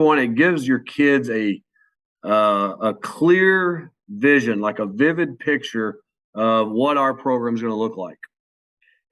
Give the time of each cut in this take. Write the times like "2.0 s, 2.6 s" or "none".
none